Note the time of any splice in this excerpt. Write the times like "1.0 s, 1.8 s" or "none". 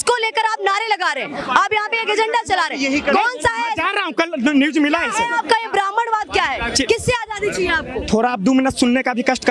none